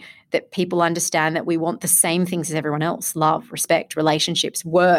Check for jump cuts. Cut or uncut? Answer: uncut